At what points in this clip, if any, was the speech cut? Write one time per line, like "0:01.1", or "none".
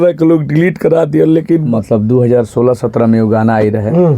0:01.7